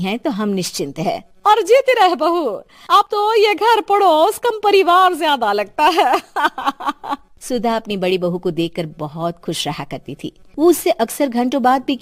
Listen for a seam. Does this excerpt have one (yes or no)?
no